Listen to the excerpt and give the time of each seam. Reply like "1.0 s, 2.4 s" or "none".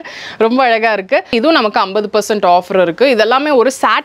1.3 s